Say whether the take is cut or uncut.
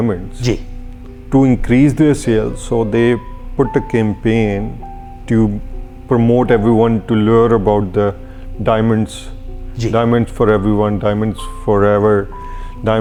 uncut